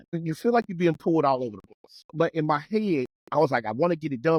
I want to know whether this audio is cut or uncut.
uncut